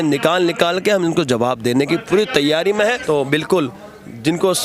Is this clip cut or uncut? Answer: cut